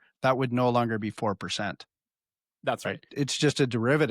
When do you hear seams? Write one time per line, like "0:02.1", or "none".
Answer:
0:03.1

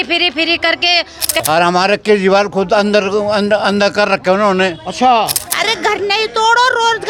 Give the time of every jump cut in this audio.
0:01.4
0:05.4

